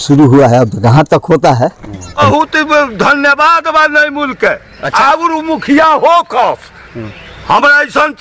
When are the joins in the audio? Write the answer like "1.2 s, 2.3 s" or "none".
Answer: 2.2 s, 4.8 s